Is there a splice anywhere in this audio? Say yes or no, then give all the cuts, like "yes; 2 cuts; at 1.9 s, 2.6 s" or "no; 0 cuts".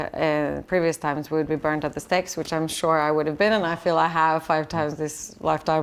no; 0 cuts